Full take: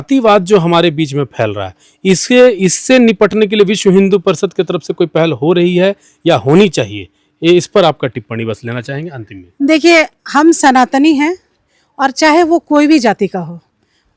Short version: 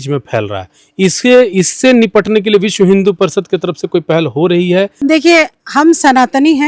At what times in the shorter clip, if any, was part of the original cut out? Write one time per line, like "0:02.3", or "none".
0:04.9